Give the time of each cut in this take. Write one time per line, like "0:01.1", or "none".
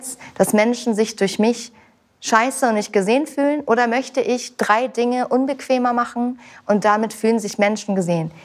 none

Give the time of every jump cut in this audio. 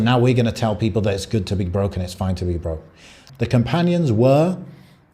0:03.2

